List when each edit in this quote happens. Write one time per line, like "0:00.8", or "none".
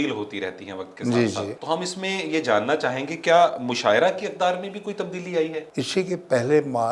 0:01.6
0:05.7